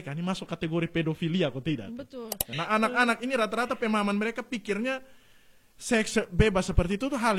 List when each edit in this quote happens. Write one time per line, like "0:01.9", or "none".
0:02.5